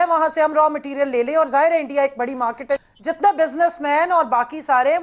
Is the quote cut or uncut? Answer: cut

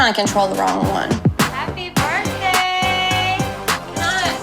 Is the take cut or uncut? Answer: uncut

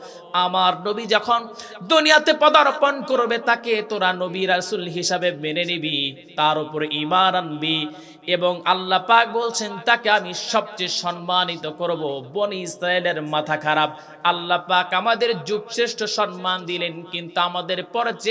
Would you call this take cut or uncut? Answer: uncut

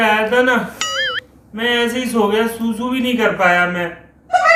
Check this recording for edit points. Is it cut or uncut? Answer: uncut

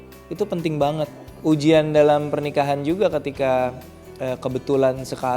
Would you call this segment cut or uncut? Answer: cut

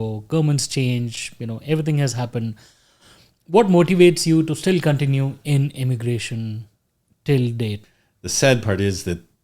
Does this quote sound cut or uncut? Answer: cut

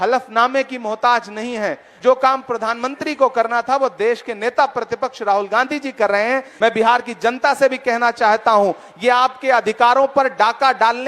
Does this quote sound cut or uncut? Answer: cut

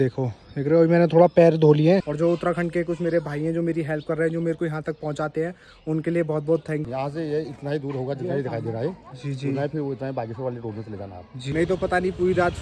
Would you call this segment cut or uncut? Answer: cut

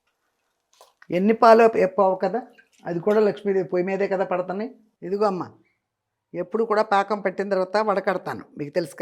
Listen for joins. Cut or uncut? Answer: cut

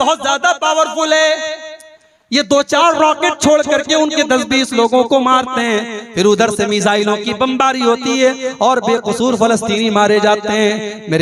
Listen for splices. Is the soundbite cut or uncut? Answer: uncut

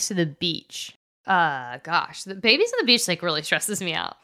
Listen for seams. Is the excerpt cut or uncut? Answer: cut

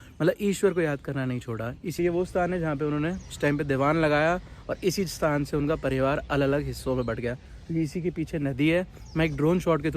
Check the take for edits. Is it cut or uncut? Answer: cut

